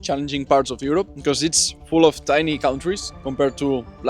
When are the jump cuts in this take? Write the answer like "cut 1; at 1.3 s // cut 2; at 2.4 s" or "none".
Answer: cut 1; at 1.1 s // cut 2; at 3.1 s

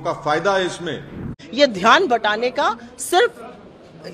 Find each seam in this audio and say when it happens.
cut 1; at 1.3 s

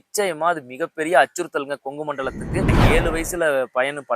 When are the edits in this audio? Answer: cut 1; at 2.7 s

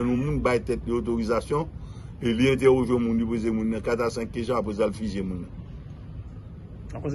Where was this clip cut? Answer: none

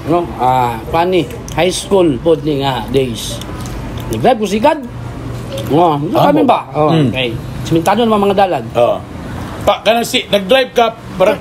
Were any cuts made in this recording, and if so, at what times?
none

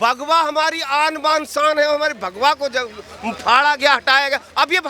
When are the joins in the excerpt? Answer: none

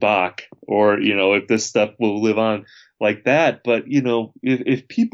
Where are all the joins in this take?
none

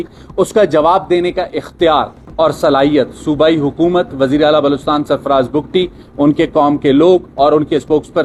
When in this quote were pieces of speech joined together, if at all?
none

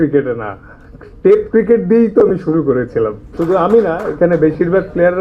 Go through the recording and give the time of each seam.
cut 1; at 3.3 s

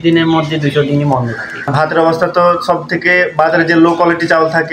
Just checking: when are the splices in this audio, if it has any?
cut 1; at 1.6 s

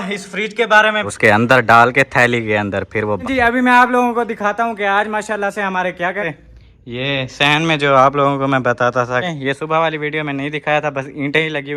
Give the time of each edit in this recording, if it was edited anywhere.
cut 1; at 1.1 s // cut 2; at 3.2 s // cut 3; at 6.3 s // cut 4; at 9.3 s

